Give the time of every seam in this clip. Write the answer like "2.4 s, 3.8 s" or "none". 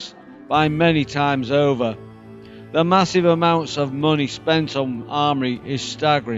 2.9 s